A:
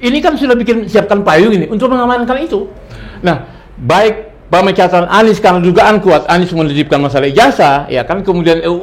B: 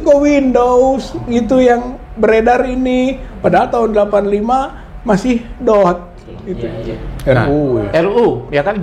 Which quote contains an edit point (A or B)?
B